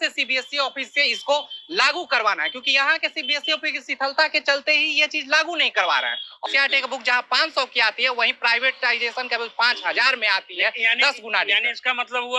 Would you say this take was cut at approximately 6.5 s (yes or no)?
yes